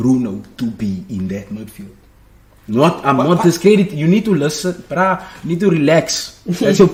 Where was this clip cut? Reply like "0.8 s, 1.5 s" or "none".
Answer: none